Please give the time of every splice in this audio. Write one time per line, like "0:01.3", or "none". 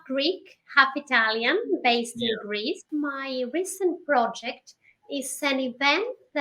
0:02.8